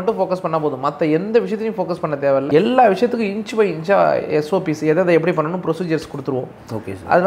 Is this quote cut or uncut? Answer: uncut